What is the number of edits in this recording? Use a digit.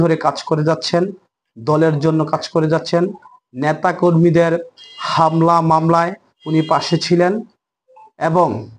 0